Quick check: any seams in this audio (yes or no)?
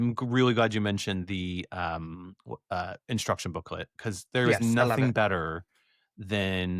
no